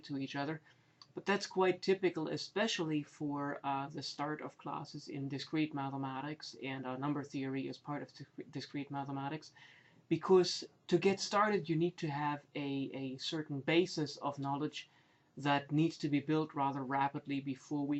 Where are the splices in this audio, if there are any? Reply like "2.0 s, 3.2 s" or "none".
16.6 s